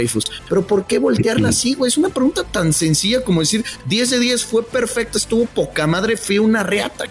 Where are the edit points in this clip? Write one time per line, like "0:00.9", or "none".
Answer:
none